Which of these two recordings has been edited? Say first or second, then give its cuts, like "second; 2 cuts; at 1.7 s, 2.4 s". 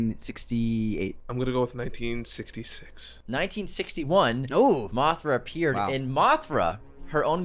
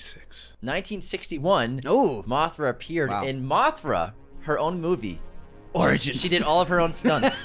first; 1 cut; at 1.2 s